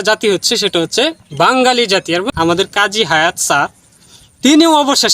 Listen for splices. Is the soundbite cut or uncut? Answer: cut